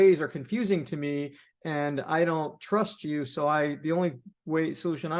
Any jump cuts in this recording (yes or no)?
no